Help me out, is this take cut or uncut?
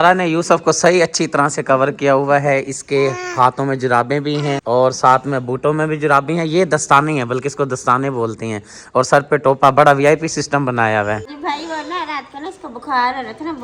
uncut